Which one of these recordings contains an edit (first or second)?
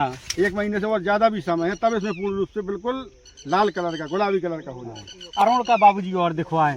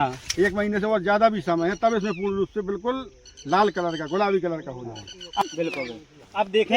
second